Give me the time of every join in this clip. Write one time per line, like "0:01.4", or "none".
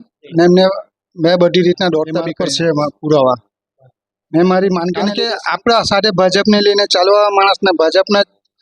0:02.3
0:05.1